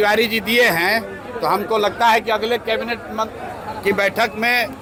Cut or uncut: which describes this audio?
uncut